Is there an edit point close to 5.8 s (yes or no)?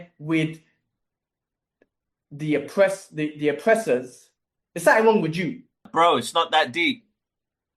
yes